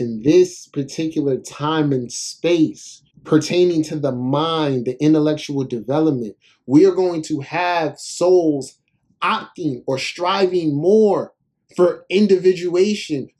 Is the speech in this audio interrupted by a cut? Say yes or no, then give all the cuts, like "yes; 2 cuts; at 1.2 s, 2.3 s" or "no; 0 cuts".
no; 0 cuts